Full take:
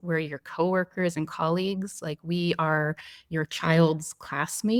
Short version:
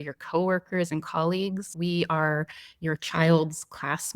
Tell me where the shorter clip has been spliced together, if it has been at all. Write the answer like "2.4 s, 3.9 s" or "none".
1.7 s